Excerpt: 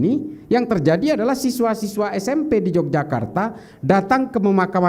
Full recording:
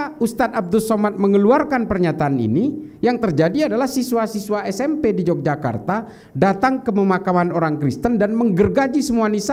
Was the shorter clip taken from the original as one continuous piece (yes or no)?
yes